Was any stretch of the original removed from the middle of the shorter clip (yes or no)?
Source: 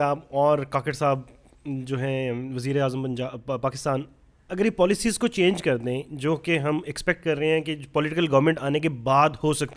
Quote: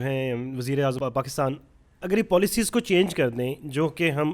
yes